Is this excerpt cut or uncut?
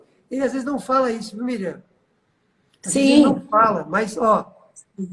uncut